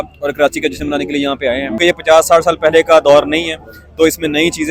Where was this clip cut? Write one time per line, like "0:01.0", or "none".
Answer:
0:01.8